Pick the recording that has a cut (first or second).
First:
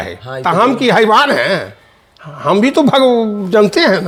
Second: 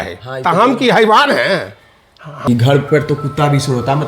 second